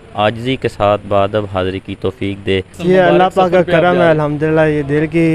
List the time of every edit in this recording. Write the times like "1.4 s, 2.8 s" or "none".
2.8 s